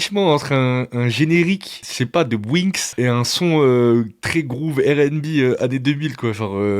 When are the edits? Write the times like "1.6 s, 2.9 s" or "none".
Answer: 1.9 s, 2.8 s